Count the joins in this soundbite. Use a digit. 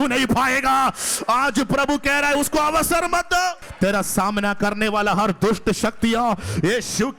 1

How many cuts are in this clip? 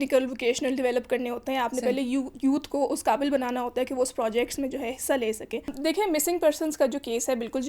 1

